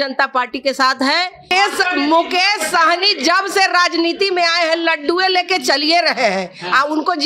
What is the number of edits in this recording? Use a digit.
1